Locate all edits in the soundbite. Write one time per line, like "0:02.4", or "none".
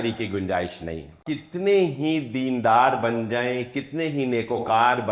0:01.2